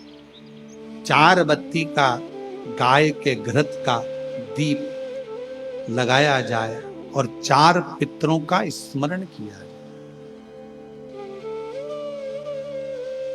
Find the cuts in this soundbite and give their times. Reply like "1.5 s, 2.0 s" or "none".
9.7 s, 10.9 s, 12.1 s

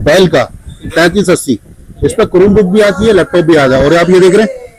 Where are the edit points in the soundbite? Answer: none

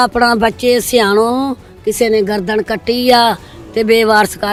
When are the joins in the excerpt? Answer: none

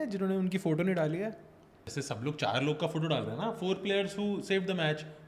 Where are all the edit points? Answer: 1.9 s

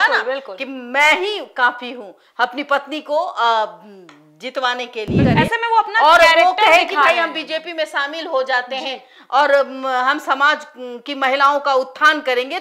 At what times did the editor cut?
5.2 s

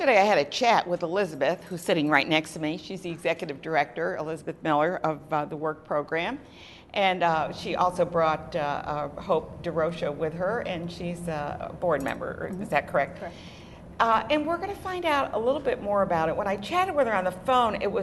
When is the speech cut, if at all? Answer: none

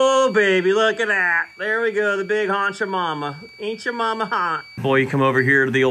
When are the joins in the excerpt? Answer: 4.6 s

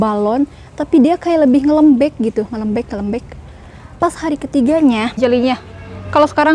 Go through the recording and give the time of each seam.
5.2 s

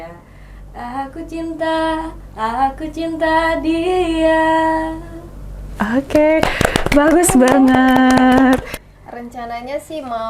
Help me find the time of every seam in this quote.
8.8 s

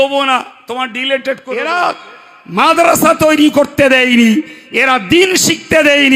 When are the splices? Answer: 1.7 s

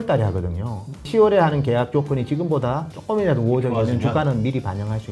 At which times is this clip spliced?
1.1 s, 2.9 s

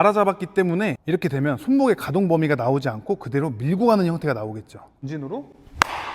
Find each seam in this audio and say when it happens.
1.0 s, 5.0 s

